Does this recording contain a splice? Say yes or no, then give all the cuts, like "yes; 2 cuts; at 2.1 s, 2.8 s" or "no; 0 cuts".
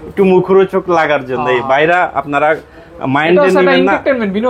no; 0 cuts